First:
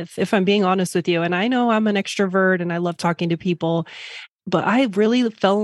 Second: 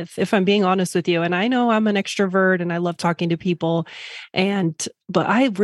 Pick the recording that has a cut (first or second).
first